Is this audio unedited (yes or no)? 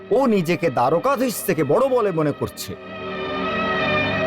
yes